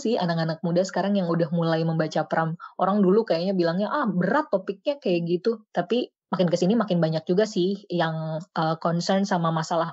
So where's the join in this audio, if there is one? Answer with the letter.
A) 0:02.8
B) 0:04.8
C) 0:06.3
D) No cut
D